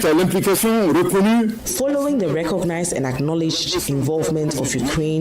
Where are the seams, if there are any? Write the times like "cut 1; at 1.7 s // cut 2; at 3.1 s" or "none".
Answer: cut 1; at 1.6 s

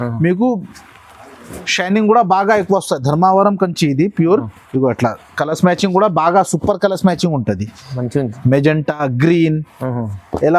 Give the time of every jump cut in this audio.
none

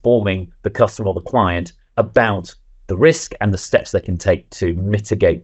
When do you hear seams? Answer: cut 1; at 4.5 s

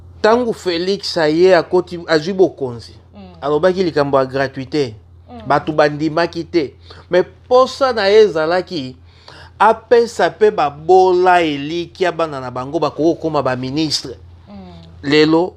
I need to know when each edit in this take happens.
none

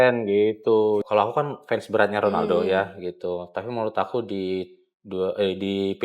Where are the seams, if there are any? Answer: cut 1; at 1.0 s

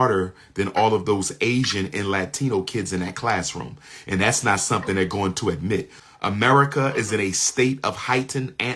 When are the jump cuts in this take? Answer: cut 1; at 6.0 s

